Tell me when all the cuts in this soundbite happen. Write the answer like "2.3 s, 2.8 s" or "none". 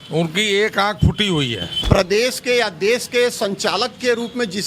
1.7 s